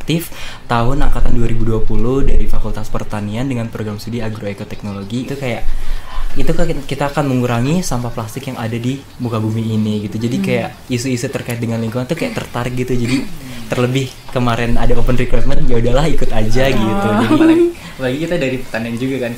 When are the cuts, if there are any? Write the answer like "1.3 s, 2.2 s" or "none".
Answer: 5.3 s